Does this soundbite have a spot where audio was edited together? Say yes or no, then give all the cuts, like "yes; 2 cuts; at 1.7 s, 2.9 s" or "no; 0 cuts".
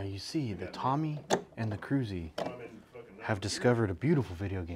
no; 0 cuts